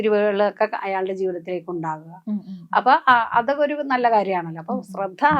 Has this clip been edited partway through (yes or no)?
no